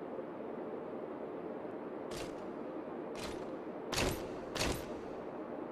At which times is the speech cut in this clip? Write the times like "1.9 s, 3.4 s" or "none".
1.5 s